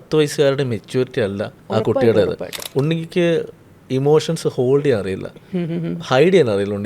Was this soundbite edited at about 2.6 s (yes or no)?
yes